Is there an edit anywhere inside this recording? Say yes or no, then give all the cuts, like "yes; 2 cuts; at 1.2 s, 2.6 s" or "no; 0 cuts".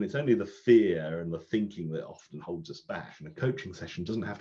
yes; 1 cut; at 3.3 s